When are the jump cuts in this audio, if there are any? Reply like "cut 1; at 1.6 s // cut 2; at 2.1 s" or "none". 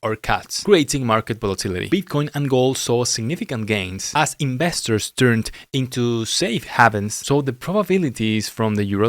cut 1; at 1.8 s // cut 2; at 7.2 s